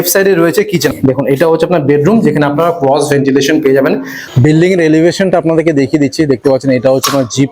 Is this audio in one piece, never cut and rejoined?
no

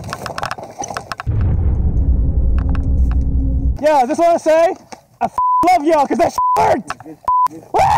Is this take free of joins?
no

